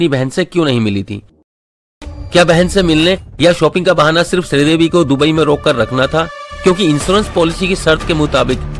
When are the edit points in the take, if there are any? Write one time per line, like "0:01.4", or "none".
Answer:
0:01.6